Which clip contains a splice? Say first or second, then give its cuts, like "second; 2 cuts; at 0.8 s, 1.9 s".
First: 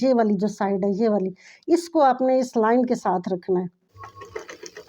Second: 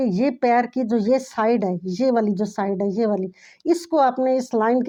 first; 1 cut; at 3.8 s